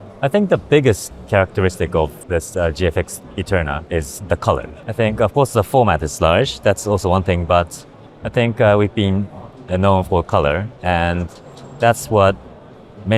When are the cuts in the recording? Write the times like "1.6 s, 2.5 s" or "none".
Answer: 1.1 s, 2.2 s, 3.8 s, 4.8 s